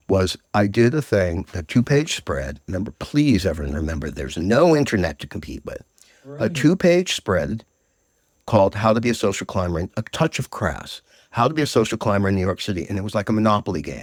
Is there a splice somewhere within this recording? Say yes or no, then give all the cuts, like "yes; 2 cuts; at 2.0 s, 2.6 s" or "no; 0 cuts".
no; 0 cuts